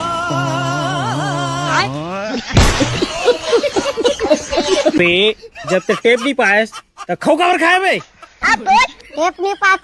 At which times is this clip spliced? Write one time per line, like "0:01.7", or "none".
0:05.0